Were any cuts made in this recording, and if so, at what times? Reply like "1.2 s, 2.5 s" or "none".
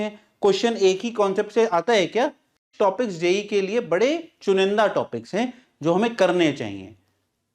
2.7 s